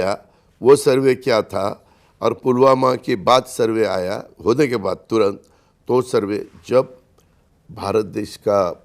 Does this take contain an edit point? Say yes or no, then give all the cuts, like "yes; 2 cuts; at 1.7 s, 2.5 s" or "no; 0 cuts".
no; 0 cuts